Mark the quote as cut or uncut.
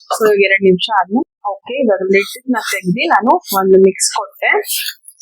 cut